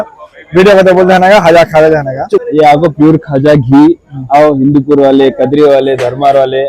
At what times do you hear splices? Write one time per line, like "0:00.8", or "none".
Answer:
0:02.5